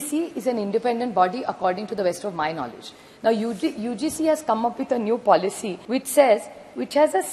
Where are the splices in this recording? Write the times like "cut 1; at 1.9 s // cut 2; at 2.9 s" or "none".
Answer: cut 1; at 5.7 s